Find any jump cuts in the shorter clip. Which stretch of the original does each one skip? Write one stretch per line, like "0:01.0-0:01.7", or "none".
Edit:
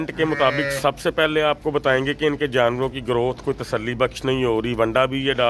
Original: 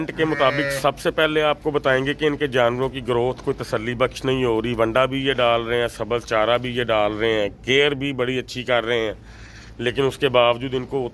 none